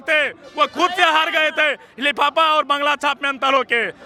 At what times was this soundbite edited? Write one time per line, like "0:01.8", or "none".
none